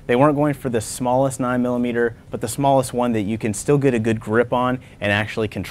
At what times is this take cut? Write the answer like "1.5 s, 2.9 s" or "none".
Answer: none